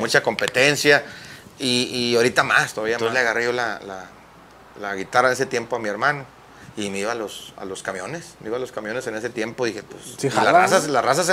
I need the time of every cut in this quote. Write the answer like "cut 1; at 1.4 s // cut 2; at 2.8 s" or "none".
cut 1; at 3.0 s